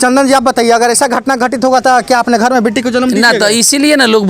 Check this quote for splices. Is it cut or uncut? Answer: uncut